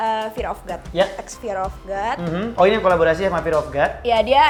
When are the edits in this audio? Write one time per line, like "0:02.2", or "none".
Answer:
none